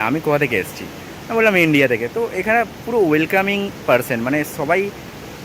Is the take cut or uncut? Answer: uncut